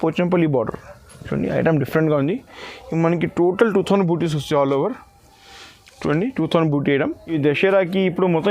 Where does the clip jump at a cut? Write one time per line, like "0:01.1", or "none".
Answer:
0:07.3